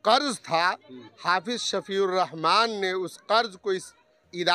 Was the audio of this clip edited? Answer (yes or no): no